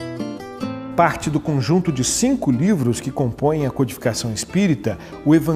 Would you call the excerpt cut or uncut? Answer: uncut